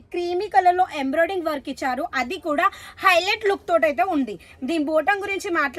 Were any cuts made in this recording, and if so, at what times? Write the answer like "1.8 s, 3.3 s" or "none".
none